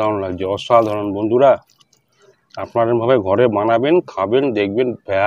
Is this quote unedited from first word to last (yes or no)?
yes